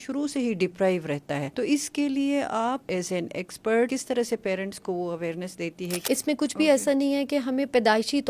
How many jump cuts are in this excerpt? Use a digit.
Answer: 4